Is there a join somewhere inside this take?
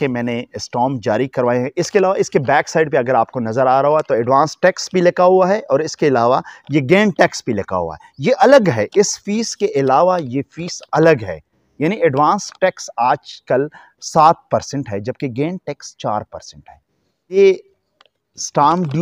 yes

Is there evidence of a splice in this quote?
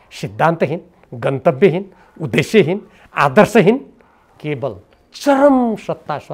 no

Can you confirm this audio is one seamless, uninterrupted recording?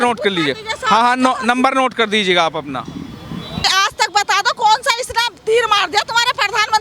no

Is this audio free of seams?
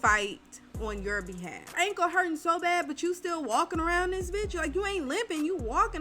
no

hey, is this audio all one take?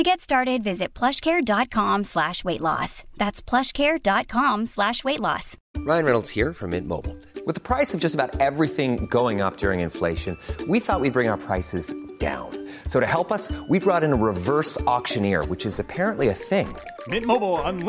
no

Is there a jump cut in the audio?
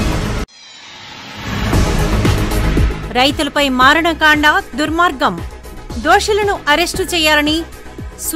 no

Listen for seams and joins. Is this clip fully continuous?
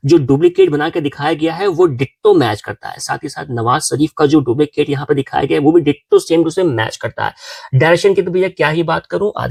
yes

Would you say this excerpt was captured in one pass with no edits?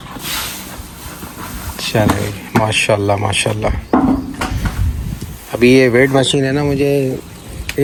yes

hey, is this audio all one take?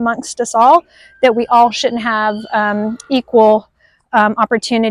yes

